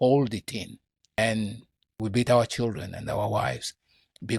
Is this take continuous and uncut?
no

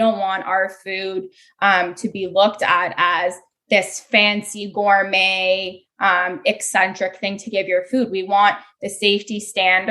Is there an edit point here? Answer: no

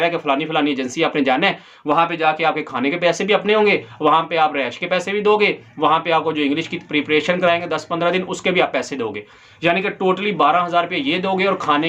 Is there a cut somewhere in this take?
no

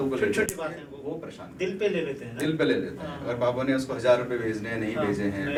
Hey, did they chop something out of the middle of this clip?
no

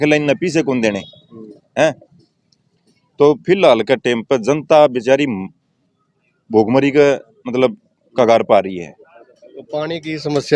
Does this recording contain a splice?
no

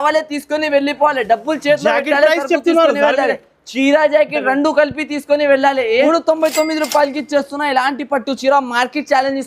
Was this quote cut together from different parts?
yes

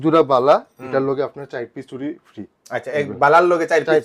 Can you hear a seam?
no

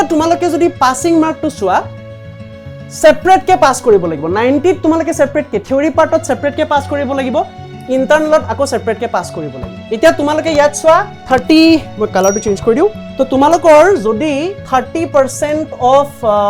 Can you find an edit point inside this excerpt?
no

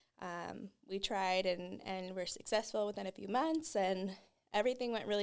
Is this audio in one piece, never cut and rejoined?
yes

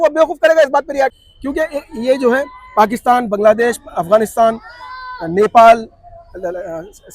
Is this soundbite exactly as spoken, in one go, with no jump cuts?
no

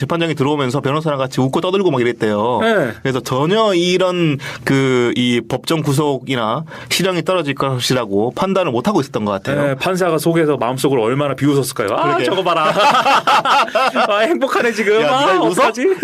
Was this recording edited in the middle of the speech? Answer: no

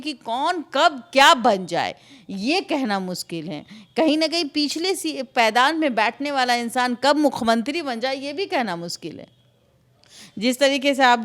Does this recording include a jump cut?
no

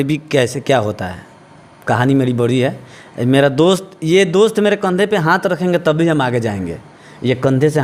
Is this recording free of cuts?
yes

